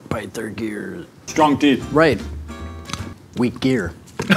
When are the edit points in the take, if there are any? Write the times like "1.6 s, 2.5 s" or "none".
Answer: none

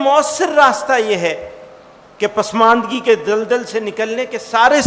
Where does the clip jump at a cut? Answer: none

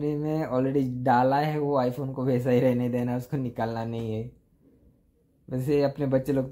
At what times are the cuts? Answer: none

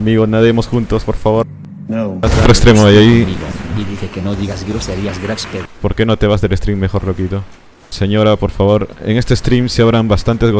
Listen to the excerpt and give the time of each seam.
2.4 s, 5.7 s

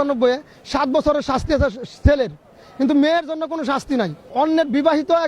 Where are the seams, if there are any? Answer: 4.2 s

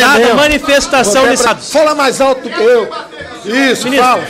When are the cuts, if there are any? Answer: 1.5 s

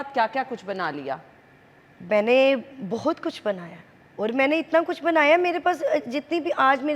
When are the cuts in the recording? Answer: none

